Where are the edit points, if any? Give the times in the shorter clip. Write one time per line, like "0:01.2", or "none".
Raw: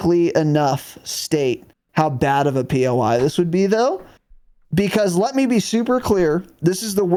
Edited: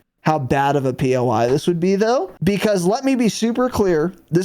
0:02.3